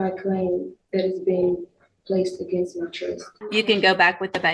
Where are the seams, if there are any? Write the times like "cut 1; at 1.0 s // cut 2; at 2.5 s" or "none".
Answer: cut 1; at 3.3 s